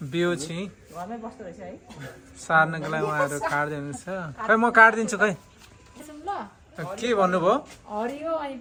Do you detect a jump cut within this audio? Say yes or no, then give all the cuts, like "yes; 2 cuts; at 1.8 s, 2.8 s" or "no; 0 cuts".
no; 0 cuts